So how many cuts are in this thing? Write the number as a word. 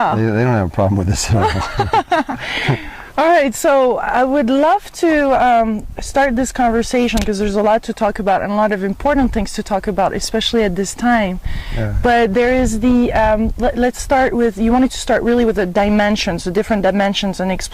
one